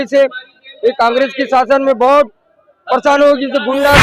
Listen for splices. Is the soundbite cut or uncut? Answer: uncut